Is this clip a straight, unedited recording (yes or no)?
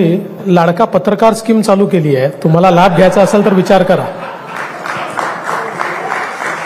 yes